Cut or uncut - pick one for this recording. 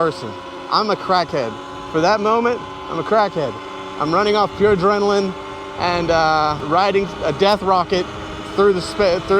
cut